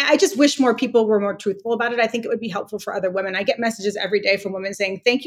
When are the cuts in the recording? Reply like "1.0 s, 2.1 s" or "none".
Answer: none